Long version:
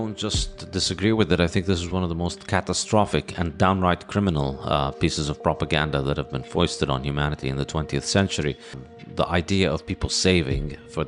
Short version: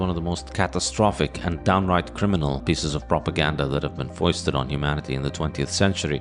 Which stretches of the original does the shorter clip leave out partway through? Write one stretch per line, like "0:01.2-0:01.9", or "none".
0:04.5-0:04.9